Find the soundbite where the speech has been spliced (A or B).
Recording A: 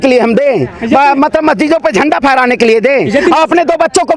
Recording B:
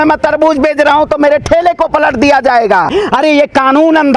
B